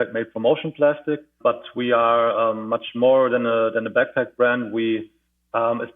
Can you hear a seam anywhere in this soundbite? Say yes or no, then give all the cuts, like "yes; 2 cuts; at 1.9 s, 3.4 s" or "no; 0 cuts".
yes; 1 cut; at 1.3 s